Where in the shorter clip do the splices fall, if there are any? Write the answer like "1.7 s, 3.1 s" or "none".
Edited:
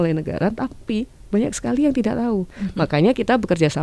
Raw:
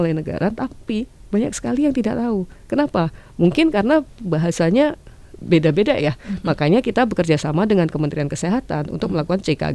2.6 s